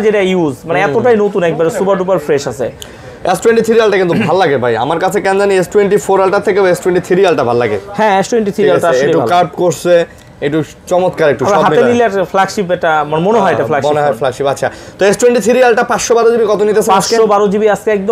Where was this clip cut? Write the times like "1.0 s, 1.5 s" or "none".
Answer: none